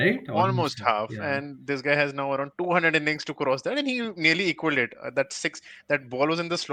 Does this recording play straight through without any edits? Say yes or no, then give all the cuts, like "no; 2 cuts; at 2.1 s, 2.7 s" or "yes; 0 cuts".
yes; 0 cuts